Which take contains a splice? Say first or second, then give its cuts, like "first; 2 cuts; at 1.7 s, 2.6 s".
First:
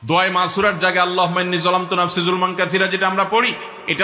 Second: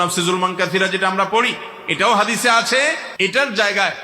second; 1 cut; at 3.1 s